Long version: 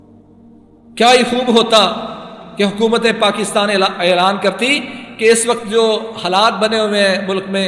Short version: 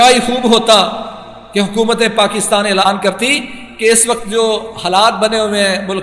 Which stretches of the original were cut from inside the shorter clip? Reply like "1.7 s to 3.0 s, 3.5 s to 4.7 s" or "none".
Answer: 3.9 s to 4.2 s